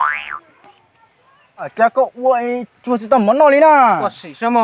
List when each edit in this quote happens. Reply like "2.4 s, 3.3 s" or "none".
1.7 s